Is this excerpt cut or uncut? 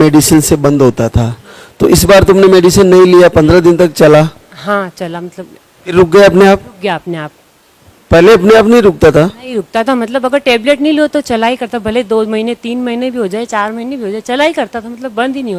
uncut